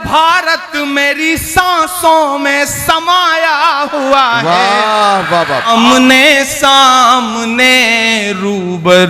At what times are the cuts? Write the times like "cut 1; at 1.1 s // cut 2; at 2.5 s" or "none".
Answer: cut 1; at 5.7 s